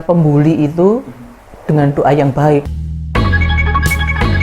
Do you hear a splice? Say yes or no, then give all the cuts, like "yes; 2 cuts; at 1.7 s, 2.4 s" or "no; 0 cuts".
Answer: yes; 1 cut; at 2.7 s